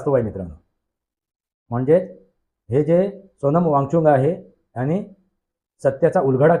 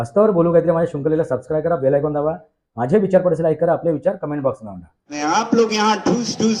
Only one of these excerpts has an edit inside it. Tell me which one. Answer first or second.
second